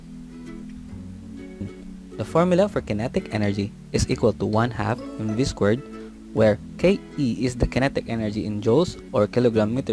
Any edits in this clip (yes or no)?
yes